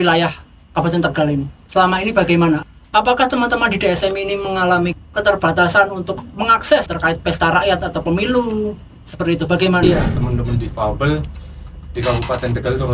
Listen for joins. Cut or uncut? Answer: cut